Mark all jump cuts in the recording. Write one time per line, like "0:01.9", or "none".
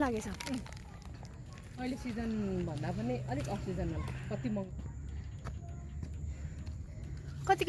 0:04.7